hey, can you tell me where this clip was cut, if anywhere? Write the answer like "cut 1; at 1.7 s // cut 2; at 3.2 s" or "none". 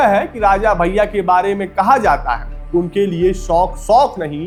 none